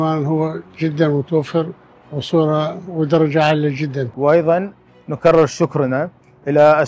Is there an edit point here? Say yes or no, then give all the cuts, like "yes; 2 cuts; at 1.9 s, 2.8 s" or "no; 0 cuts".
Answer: yes; 1 cut; at 4.1 s